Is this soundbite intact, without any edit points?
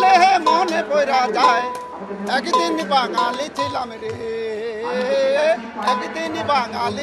yes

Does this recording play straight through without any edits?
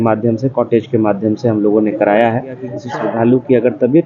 no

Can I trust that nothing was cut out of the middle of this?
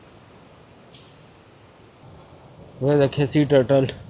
no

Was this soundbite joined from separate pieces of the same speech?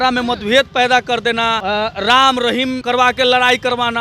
yes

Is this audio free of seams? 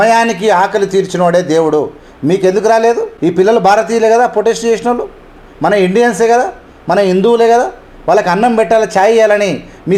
yes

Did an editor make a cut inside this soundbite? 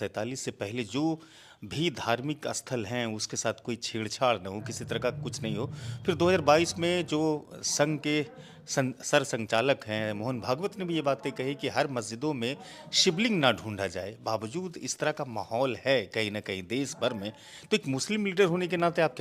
no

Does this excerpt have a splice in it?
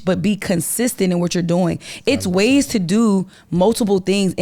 no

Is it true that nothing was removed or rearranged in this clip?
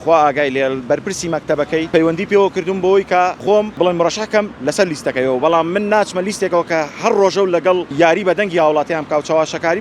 no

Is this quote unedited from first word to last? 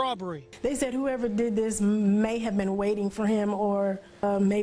yes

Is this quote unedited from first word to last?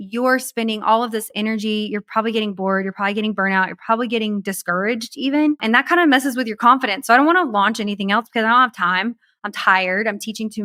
yes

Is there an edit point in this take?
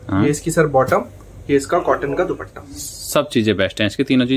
no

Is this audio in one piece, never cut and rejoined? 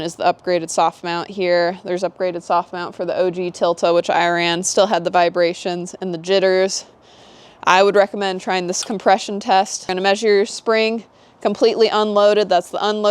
no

